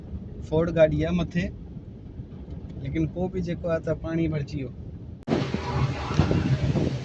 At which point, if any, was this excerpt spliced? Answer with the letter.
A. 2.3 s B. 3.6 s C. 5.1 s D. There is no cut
C